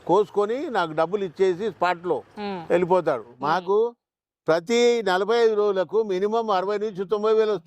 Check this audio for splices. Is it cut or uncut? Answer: cut